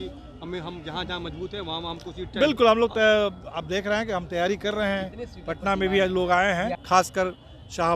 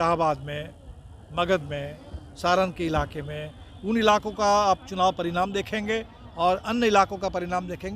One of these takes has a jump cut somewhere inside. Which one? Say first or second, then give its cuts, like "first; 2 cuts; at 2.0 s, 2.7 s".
first; 1 cut; at 6.8 s